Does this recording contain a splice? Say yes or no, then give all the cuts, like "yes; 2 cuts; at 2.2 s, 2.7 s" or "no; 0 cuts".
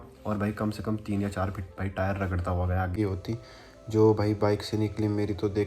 yes; 1 cut; at 2.9 s